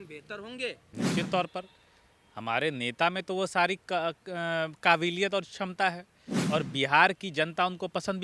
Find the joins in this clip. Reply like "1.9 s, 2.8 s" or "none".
0.9 s